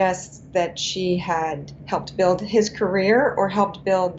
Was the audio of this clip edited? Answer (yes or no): no